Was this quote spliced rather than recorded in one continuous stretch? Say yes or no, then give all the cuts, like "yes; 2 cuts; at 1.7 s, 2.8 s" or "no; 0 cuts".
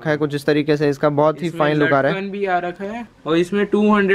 no; 0 cuts